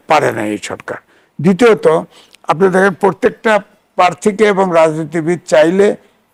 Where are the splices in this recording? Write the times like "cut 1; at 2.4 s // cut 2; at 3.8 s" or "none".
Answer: none